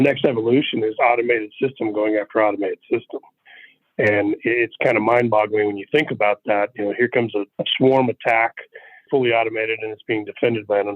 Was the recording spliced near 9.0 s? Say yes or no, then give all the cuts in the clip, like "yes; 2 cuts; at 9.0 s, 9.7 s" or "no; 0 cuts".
yes; 1 cut; at 9.0 s